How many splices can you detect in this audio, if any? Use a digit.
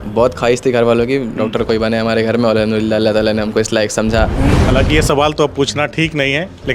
1